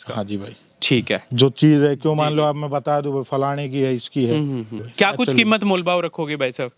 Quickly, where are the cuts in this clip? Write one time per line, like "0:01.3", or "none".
0:04.8